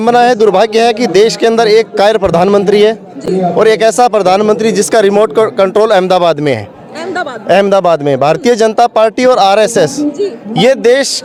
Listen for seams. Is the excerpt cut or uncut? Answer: uncut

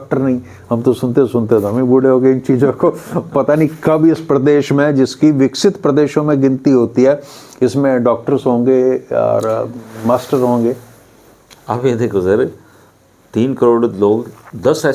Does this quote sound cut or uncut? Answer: uncut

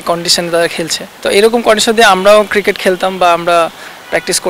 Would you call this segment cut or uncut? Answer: cut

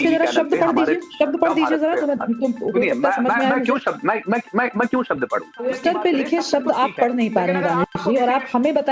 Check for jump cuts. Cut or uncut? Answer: cut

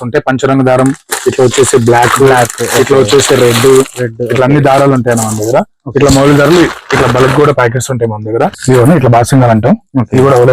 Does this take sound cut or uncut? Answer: cut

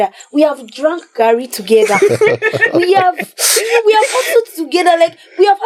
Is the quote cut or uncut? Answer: uncut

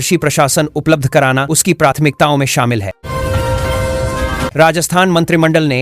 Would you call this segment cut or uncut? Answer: cut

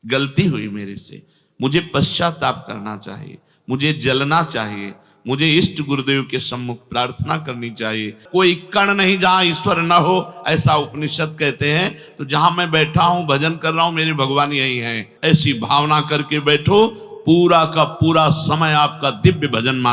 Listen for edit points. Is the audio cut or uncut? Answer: cut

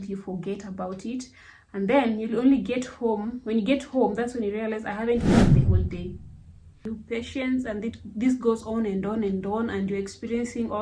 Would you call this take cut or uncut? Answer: cut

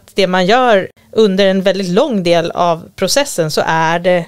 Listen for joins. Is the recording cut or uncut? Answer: cut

